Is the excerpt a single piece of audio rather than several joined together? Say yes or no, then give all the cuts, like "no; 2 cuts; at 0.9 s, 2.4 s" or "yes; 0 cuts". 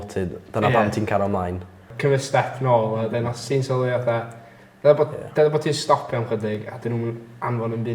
no; 1 cut; at 1.9 s